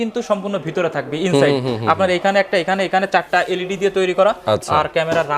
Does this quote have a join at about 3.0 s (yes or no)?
no